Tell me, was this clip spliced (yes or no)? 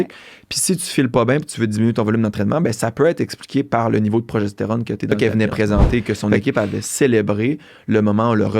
yes